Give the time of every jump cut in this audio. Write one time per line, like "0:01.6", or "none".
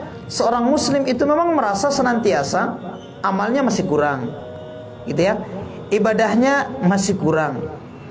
none